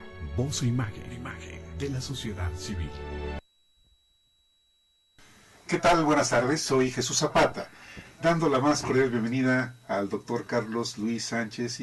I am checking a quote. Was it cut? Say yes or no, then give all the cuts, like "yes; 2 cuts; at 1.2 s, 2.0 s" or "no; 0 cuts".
yes; 1 cut; at 3.4 s